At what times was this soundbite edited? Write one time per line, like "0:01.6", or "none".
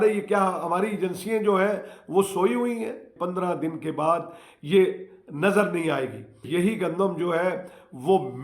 0:03.1
0:06.4